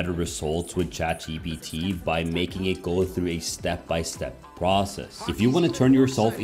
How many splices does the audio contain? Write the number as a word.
two